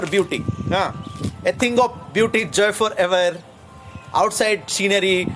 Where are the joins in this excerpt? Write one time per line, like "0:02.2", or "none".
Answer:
none